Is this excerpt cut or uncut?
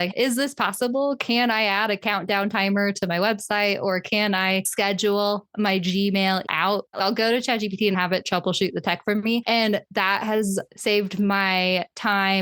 cut